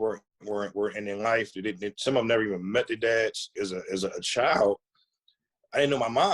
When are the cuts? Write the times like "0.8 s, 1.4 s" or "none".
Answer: 3.5 s

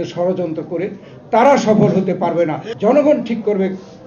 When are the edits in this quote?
2.6 s

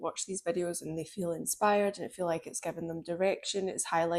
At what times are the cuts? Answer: none

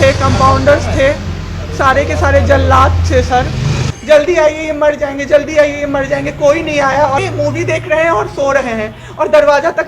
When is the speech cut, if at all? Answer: 3.9 s, 7.2 s

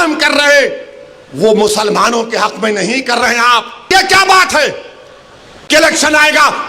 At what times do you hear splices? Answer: 3.9 s

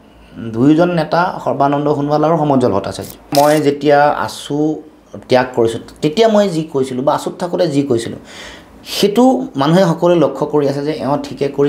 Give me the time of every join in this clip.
3.3 s

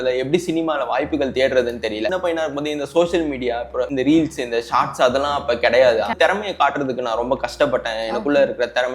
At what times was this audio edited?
2.1 s, 3.9 s, 6.2 s

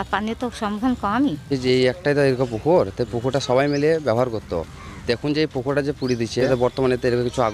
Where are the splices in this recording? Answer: 1.5 s, 6.4 s

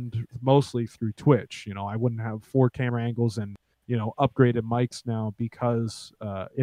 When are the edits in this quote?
none

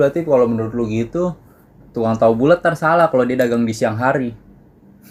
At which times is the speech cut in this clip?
none

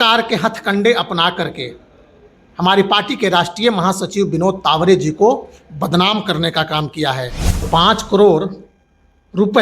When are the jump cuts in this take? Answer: 7.7 s

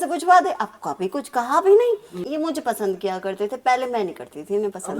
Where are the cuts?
2.2 s

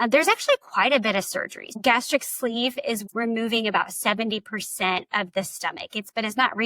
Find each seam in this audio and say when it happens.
1.8 s, 3.0 s

